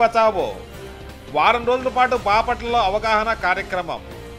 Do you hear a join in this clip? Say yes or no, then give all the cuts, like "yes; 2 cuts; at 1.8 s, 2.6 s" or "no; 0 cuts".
no; 0 cuts